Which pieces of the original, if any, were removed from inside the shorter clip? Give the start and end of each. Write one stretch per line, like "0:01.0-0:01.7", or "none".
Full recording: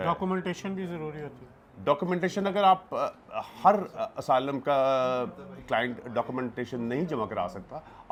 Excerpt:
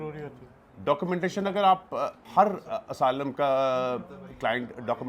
0:03.2-0:03.5